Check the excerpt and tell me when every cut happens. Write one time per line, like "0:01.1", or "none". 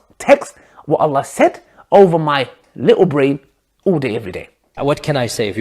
0:04.7